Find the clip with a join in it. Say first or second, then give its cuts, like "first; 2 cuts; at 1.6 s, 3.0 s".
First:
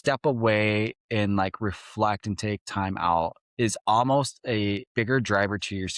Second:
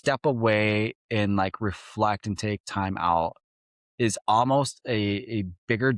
first; 2 cuts; at 3.4 s, 4.8 s